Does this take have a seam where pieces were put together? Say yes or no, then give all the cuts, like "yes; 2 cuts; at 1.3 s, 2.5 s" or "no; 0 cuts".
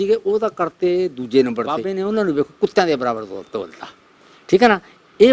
yes; 1 cut; at 1.9 s